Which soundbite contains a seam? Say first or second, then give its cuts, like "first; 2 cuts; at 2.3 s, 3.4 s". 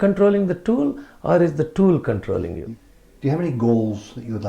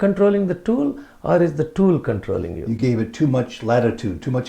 first; 1 cut; at 2.6 s